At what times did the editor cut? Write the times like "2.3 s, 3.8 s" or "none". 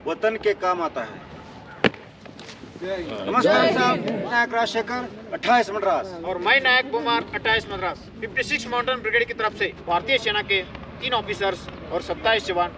4.3 s, 9.8 s